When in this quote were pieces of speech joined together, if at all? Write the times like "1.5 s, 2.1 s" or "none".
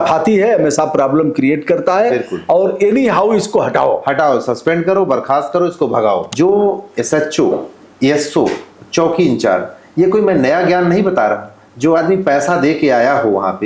6.3 s